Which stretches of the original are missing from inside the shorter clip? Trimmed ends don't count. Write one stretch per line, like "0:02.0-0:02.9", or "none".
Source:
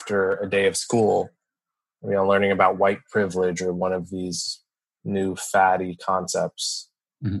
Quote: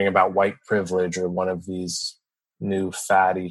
none